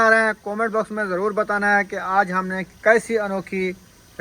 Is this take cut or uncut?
uncut